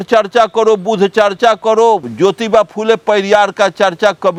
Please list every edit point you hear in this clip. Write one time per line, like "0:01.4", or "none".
none